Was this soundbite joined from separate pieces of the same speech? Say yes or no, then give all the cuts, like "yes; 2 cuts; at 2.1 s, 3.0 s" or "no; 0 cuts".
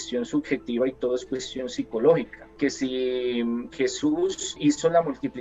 yes; 2 cuts; at 2.4 s, 4.6 s